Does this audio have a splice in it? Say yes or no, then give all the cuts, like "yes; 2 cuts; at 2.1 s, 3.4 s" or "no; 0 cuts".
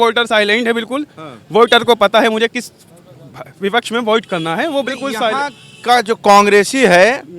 no; 0 cuts